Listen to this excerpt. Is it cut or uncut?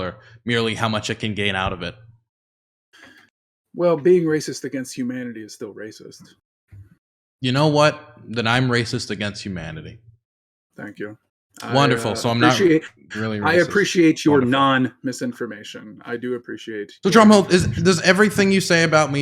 uncut